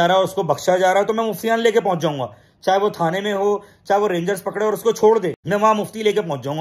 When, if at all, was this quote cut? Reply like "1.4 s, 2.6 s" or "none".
5.4 s